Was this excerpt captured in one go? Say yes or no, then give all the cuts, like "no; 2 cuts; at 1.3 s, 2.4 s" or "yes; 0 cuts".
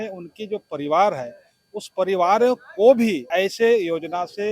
no; 1 cut; at 3.2 s